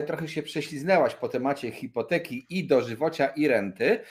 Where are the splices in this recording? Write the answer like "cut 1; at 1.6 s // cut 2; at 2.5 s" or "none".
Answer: none